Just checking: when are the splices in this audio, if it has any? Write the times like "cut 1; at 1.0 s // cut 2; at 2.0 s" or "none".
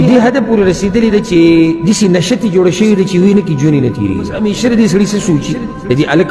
cut 1; at 1.8 s // cut 2; at 4.3 s